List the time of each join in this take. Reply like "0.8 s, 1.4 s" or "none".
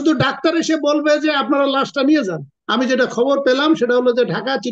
2.5 s